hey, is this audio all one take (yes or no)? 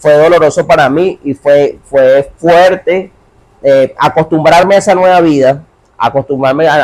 yes